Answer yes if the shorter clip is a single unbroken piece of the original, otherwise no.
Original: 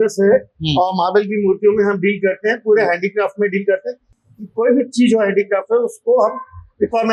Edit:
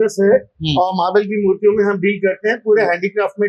yes